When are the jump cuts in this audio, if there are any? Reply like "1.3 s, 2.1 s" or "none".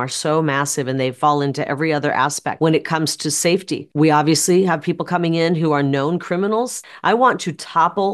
2.4 s, 3.8 s, 6.8 s